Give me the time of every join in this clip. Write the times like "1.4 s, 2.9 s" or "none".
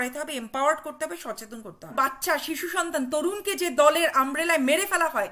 1.9 s